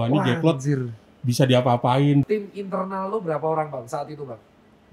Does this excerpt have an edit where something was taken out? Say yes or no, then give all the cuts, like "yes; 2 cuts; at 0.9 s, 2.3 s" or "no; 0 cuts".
yes; 1 cut; at 2.2 s